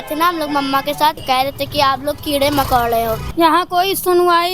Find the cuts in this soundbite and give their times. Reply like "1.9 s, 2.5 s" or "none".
1.2 s, 3.2 s